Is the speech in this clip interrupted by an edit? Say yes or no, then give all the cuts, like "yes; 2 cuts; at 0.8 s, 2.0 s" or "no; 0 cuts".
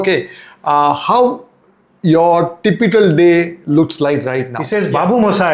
yes; 1 cut; at 4.6 s